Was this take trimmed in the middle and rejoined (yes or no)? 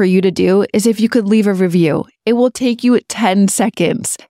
no